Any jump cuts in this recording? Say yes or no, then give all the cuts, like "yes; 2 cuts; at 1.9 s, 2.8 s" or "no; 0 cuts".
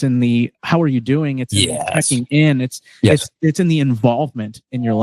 no; 0 cuts